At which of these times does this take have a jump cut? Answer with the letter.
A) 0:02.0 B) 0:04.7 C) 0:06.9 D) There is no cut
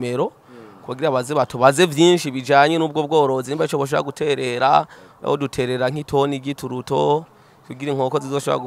D